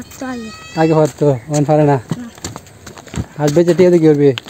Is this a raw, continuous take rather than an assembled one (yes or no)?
no